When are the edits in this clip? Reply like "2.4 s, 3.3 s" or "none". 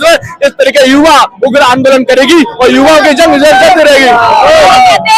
none